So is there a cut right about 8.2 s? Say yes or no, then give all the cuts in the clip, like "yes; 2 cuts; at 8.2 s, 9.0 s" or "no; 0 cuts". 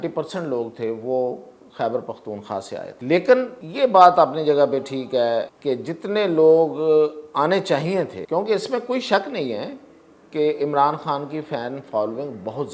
yes; 4 cuts; at 2.9 s, 3.6 s, 5.5 s, 8.2 s